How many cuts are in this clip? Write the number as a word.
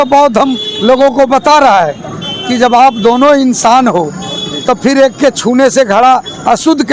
zero